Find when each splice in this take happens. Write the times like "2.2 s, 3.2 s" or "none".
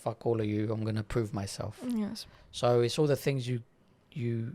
none